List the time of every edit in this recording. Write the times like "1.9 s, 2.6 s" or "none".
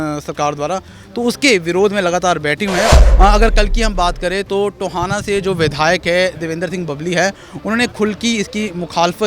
2.9 s